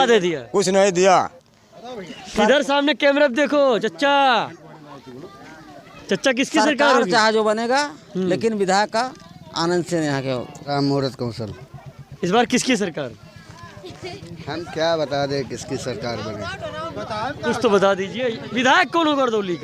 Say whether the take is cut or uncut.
cut